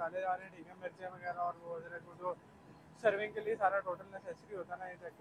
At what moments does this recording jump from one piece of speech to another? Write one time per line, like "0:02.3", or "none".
none